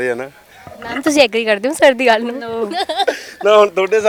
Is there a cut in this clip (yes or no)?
no